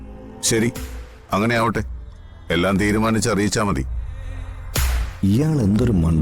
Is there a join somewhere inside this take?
yes; 1 cut; at 5.2 s

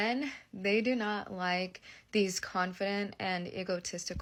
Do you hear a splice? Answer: no; 0 cuts

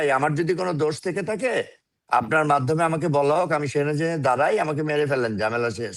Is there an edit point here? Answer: no; 0 cuts

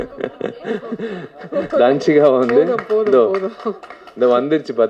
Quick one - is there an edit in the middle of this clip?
no; 0 cuts

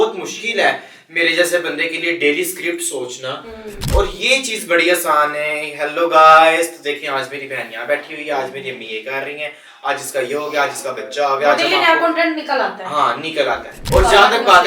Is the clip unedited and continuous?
no; 2 cuts; at 3.8 s, 13.7 s

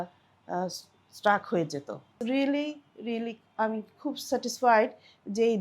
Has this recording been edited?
yes; 1 cut; at 2.1 s

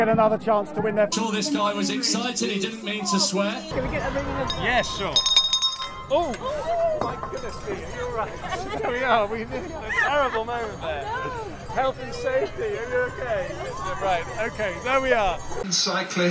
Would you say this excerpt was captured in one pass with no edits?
yes; 0 cuts

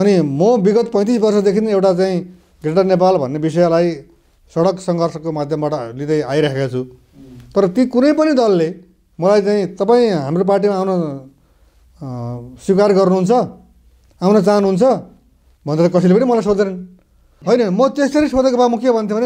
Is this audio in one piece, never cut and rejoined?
yes; 0 cuts

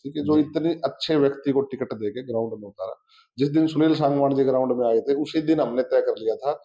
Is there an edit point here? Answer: no; 0 cuts

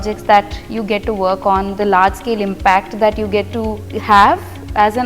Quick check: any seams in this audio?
yes; 1 cut; at 3.9 s

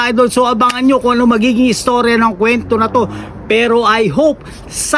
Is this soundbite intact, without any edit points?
yes; 0 cuts

